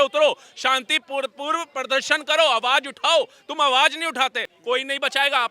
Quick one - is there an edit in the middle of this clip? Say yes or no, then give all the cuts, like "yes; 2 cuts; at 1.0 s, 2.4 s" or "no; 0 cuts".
yes; 1 cut; at 4.5 s